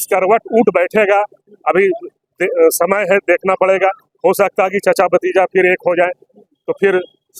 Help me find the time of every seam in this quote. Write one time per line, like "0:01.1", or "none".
none